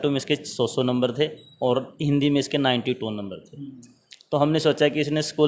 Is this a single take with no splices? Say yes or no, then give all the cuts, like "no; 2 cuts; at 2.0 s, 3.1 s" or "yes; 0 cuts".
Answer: yes; 0 cuts